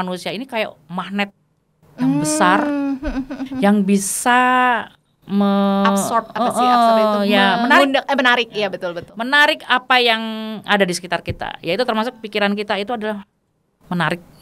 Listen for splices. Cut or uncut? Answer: uncut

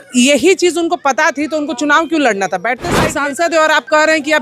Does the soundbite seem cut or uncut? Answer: cut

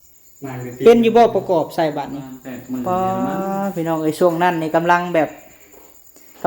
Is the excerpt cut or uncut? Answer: cut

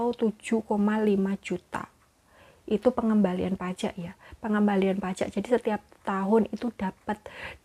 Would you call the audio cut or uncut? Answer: uncut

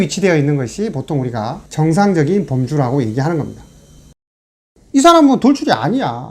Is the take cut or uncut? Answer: cut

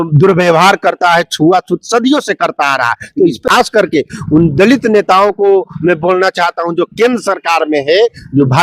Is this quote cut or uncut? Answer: cut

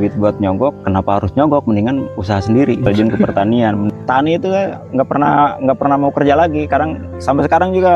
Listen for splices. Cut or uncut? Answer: cut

